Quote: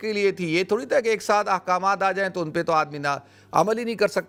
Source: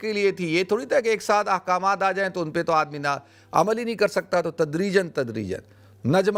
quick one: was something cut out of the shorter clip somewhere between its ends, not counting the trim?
no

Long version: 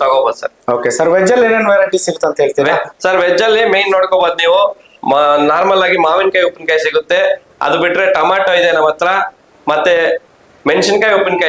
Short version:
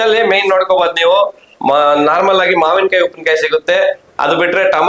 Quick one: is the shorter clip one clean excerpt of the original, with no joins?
yes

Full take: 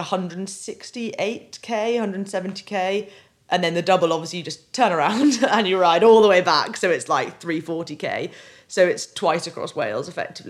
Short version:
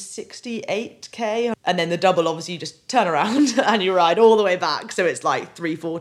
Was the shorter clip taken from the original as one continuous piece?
no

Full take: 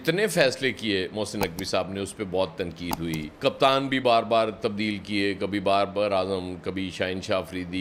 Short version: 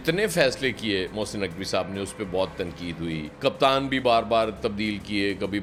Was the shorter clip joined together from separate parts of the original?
no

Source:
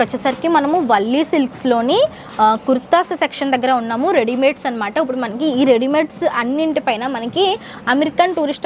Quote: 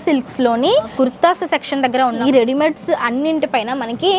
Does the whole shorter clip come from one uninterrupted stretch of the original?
no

